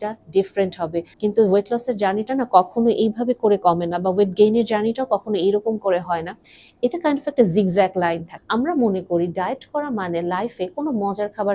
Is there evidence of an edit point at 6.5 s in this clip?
no; 2 cuts; at 1.1 s, 8.3 s

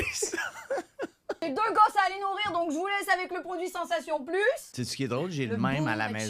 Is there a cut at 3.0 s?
no; 2 cuts; at 1.4 s, 4.8 s

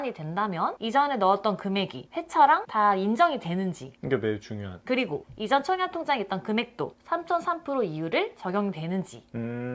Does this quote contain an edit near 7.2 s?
no; 0 cuts

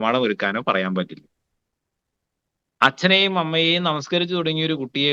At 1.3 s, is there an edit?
no; 0 cuts

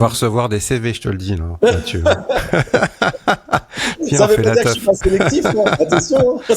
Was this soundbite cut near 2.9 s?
no; 0 cuts

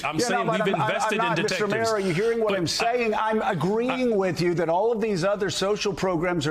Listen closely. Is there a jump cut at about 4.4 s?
no; 0 cuts

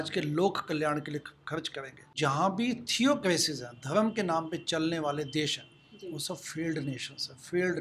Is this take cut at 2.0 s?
yes; 1 cut; at 2.0 s

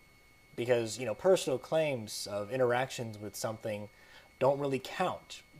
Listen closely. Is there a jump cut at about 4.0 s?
no; 1 cut; at 1.8 s

